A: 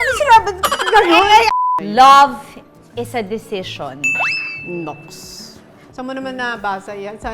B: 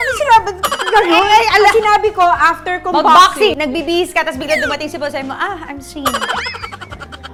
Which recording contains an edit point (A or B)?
A